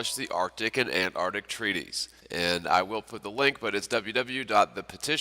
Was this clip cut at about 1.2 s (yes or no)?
yes